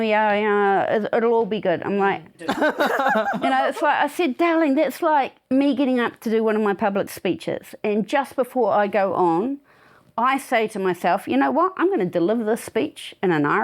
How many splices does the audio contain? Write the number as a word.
two